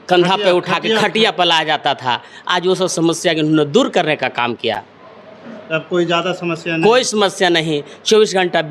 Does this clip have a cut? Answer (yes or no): no